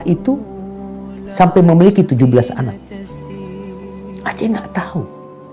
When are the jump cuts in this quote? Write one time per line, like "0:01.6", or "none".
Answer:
0:02.7
0:04.2